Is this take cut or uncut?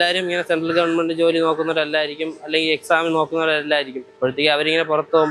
cut